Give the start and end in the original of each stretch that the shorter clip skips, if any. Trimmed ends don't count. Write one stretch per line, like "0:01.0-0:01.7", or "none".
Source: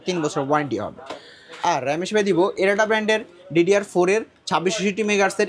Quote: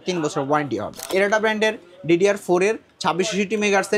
0:01.1-0:02.5